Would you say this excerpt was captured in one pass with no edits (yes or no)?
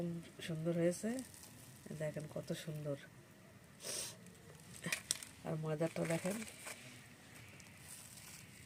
yes